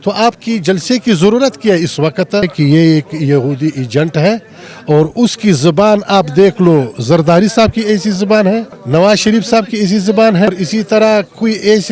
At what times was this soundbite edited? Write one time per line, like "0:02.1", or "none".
0:02.5
0:08.8
0:10.5